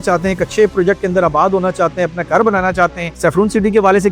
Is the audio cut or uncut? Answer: uncut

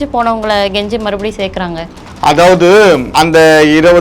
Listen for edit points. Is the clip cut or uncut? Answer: cut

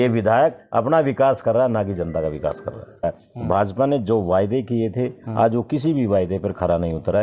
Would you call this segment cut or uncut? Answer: cut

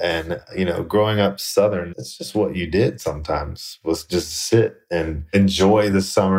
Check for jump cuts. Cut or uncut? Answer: cut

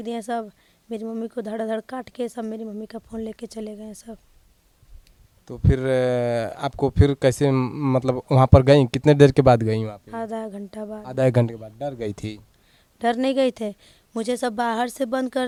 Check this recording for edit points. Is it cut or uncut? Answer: uncut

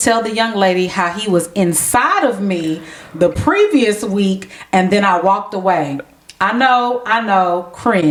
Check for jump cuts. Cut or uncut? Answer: uncut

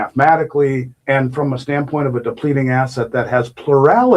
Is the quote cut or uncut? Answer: cut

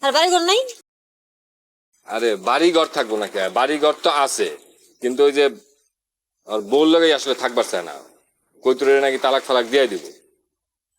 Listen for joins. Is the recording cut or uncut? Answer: uncut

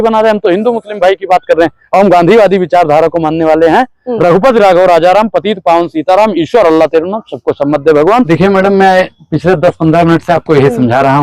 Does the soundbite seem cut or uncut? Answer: cut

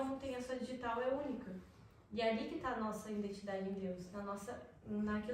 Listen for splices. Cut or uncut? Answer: uncut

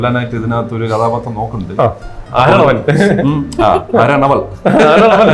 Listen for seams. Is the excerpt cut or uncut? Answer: uncut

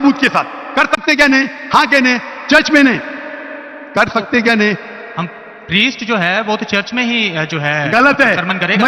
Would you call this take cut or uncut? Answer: uncut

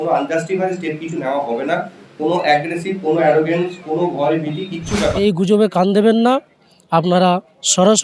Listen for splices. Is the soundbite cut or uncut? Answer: cut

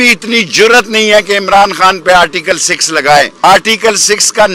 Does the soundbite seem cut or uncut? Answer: cut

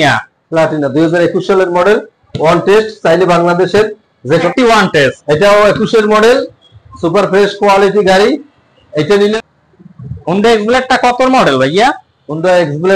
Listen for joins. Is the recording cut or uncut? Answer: cut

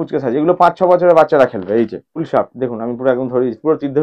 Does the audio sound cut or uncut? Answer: cut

